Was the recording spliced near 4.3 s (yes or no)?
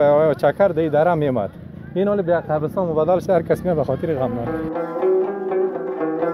no